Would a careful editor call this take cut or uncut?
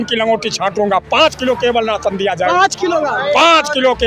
uncut